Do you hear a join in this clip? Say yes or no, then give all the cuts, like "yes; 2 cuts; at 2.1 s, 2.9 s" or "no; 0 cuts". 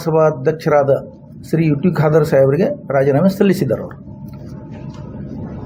no; 0 cuts